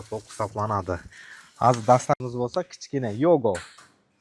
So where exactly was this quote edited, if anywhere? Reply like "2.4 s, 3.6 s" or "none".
2.2 s